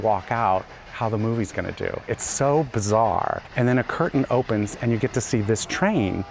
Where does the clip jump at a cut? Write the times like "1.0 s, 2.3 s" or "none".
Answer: 3.4 s